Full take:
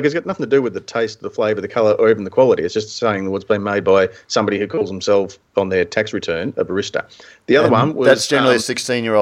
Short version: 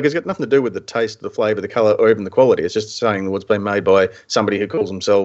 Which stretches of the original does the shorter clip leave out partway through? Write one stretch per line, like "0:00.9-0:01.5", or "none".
none

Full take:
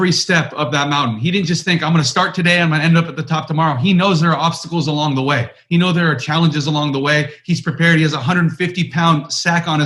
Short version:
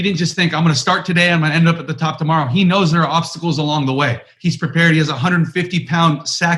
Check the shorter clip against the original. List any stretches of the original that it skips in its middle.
0:05.6-0:07.3

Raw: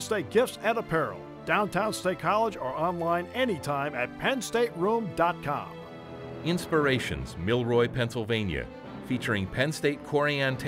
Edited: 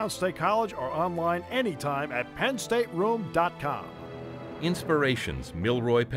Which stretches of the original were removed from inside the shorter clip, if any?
none

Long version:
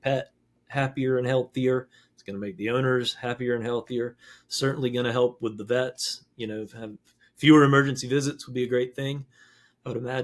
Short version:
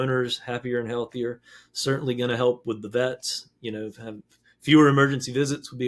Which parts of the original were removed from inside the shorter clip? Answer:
none

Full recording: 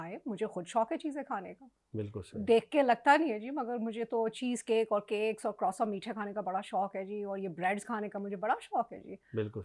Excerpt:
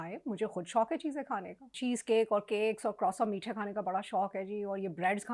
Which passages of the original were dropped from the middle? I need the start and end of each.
0:01.8-0:04.4

